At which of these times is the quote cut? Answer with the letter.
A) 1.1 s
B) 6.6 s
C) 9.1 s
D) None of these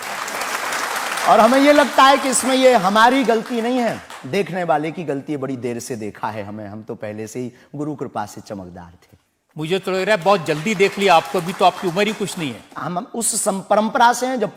D